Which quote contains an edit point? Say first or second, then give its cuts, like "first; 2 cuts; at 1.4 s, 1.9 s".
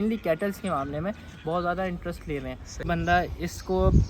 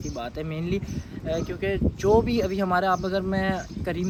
first; 1 cut; at 2.9 s